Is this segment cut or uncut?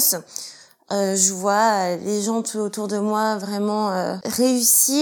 uncut